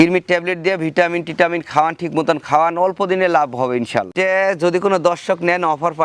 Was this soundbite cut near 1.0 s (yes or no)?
no